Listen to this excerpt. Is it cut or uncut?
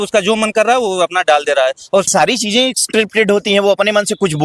cut